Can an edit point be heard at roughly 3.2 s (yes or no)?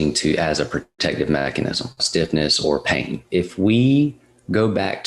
yes